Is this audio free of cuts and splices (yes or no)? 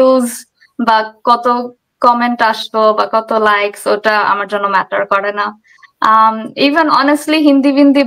yes